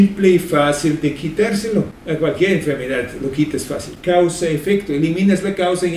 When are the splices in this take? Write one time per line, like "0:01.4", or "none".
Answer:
0:02.0